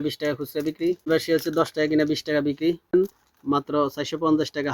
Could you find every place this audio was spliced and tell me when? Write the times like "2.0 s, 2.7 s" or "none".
1.1 s, 3.0 s